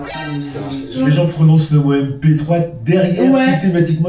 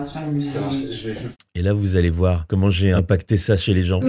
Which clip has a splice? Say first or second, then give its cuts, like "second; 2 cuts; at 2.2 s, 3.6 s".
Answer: first; 1 cut; at 0.9 s